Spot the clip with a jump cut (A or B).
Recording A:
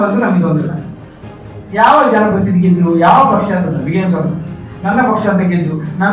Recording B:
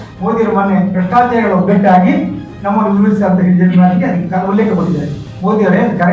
B